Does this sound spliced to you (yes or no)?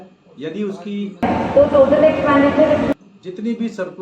yes